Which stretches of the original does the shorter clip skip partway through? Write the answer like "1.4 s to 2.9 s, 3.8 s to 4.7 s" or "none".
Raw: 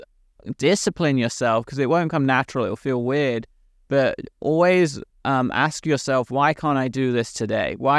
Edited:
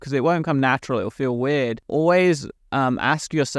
3.5 s to 4.3 s